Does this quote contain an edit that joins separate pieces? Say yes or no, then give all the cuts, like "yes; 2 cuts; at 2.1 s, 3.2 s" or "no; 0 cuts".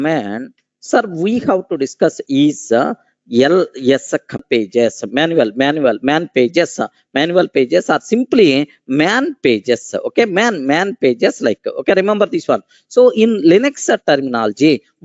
yes; 1 cut; at 4.4 s